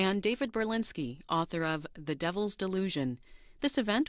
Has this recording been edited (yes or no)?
no